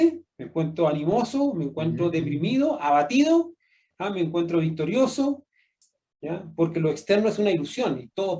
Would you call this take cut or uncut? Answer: cut